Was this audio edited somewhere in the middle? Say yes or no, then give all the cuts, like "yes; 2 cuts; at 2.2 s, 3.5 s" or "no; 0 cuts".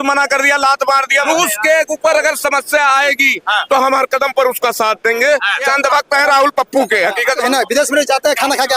yes; 3 cuts; at 1.2 s, 5.7 s, 7.4 s